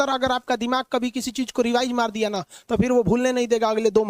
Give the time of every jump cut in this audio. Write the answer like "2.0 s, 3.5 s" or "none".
none